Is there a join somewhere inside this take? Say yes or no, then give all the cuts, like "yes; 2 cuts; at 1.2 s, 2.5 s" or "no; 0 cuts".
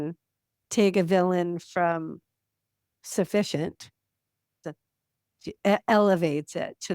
yes; 1 cut; at 4.6 s